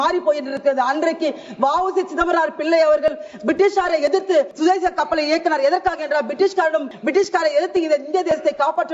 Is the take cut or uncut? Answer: cut